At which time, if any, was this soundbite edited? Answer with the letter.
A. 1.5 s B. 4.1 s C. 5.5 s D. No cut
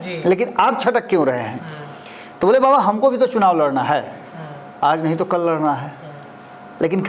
D